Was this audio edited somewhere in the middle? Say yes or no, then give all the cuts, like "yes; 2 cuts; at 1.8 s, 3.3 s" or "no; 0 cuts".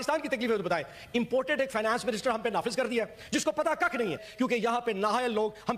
yes; 1 cut; at 4.2 s